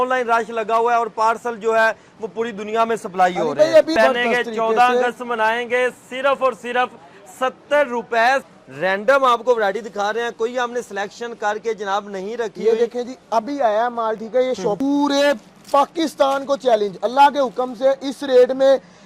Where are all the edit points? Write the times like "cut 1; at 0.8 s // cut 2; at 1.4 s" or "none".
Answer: cut 1; at 4.0 s // cut 2; at 8.4 s // cut 3; at 14.8 s